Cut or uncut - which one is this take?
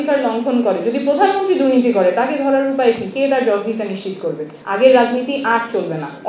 cut